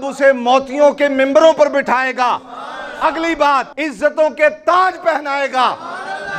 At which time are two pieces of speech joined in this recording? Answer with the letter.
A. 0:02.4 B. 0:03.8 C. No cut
B